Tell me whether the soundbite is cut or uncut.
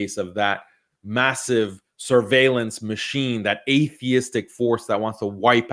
uncut